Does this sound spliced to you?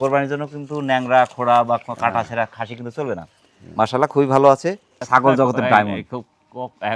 yes; 1 cut; at 4.9 s

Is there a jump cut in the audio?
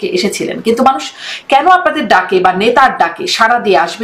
no; 0 cuts

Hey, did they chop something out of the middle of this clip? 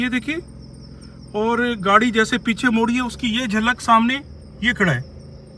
no; 0 cuts

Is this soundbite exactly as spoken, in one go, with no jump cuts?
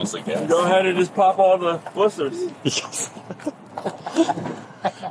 no; 1 cut; at 2.5 s

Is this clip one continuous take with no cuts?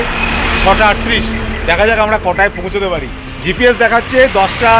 yes; 0 cuts

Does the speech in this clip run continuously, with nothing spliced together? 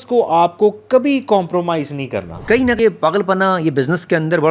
no; 1 cut; at 2.3 s

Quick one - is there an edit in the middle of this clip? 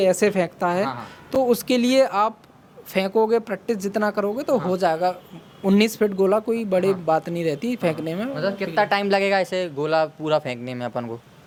no; 0 cuts

